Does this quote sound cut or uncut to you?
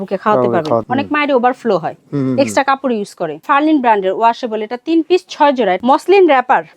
cut